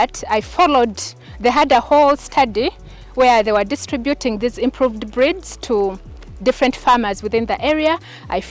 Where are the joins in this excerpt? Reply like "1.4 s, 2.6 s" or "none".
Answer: none